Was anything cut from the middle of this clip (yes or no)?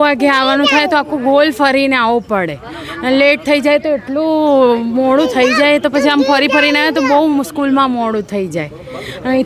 no